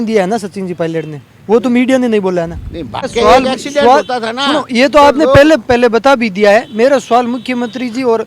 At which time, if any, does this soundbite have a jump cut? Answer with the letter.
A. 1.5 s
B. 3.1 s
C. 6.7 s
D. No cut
B